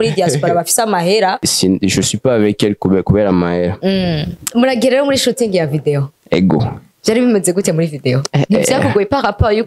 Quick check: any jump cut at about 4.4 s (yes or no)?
yes